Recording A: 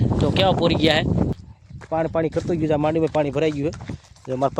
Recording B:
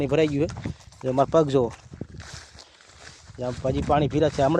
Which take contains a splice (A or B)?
A